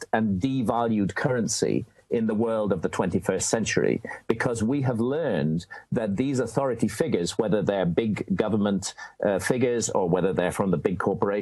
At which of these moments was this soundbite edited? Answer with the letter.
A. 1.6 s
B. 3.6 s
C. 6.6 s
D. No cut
B